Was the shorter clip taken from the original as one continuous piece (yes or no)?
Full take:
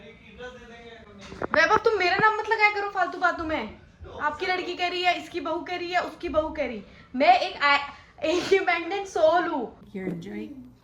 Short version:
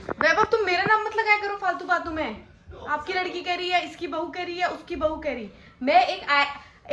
yes